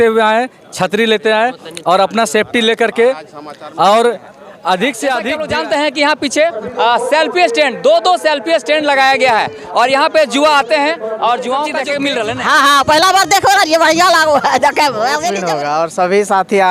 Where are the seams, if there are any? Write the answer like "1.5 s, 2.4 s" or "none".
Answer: 5.4 s, 11.9 s, 15.4 s